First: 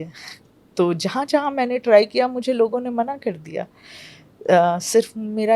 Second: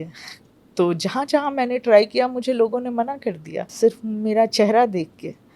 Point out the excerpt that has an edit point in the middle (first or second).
second